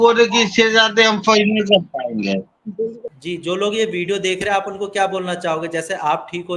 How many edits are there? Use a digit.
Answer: 1